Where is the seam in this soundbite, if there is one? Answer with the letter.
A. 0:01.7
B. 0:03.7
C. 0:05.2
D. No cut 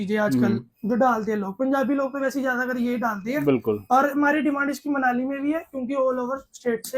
D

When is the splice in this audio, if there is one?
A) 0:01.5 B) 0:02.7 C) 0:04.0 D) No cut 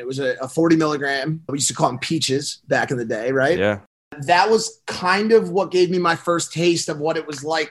A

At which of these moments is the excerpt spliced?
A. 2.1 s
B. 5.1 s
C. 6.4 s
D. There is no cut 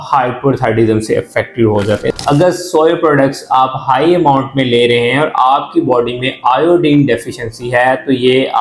A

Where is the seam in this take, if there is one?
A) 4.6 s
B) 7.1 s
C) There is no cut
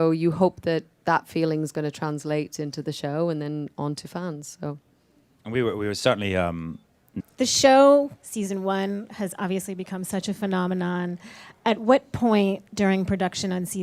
C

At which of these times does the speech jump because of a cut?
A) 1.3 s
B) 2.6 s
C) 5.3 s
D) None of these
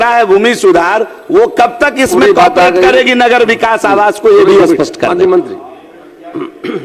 D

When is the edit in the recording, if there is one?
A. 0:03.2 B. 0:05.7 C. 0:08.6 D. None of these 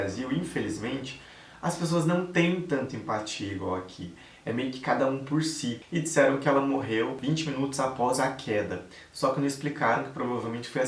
B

